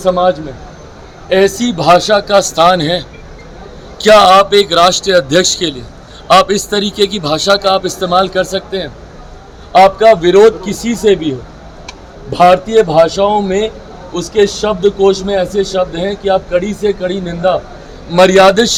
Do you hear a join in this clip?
no; 0 cuts

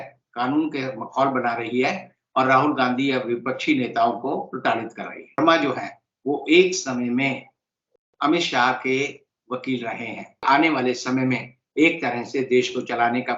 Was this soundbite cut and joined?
yes; 2 cuts; at 5.4 s, 10.4 s

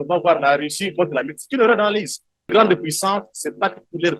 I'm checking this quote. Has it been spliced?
yes; 1 cut; at 2.5 s

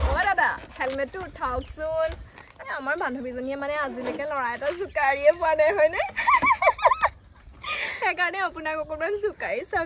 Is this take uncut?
yes; 0 cuts

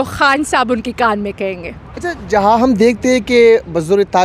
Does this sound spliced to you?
no; 0 cuts

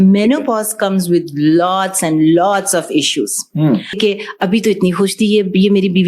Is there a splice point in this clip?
yes; 1 cut; at 4.0 s

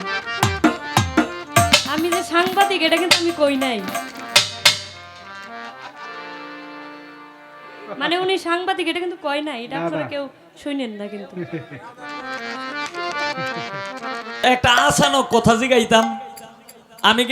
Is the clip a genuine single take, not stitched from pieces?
no; 1 cut; at 14.4 s

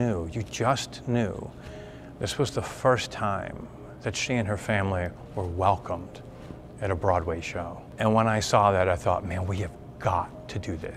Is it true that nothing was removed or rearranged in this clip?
yes; 0 cuts

